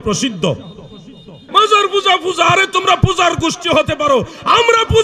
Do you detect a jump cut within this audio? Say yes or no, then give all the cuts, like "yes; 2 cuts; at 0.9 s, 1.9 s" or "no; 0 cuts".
yes; 1 cut; at 1.4 s